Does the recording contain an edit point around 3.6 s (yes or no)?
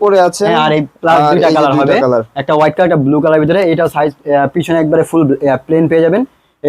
no